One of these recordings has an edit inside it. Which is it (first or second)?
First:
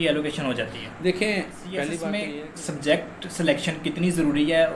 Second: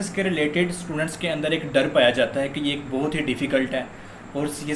first